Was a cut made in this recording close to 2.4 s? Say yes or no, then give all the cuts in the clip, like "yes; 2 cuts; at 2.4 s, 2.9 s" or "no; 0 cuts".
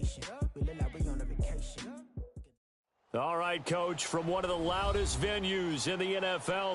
yes; 1 cut; at 2.4 s